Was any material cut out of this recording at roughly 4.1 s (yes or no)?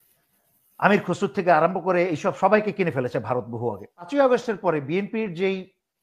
yes